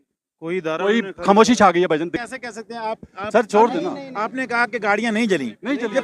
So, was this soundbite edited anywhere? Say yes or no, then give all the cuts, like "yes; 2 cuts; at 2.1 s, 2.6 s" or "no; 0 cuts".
yes; 1 cut; at 2.2 s